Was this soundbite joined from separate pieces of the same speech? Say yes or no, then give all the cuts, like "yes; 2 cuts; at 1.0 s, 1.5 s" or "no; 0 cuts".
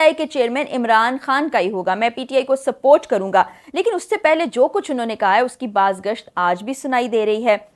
no; 0 cuts